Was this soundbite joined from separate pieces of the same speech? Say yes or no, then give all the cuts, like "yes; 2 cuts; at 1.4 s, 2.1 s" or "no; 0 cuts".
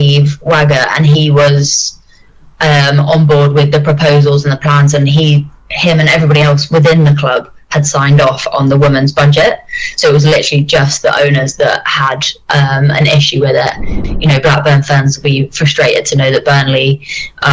yes; 1 cut; at 14.0 s